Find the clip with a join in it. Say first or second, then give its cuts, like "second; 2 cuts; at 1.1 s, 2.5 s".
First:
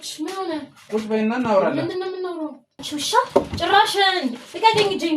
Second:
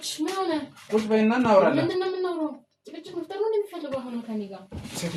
first; 1 cut; at 2.7 s